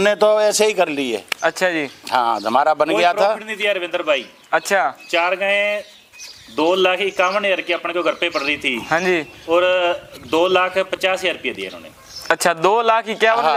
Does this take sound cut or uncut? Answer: uncut